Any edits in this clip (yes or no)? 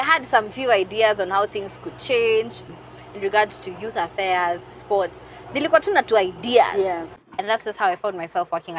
yes